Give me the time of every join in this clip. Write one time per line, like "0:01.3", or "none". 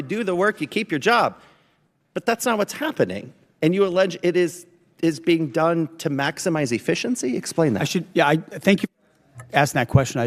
none